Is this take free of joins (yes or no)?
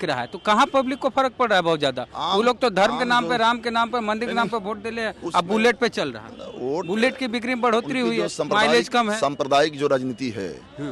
yes